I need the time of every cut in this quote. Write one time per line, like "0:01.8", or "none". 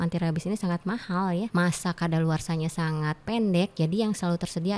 0:01.5